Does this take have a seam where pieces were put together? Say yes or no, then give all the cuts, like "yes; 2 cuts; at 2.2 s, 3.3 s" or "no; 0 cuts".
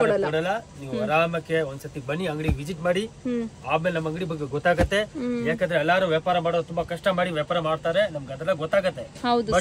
no; 0 cuts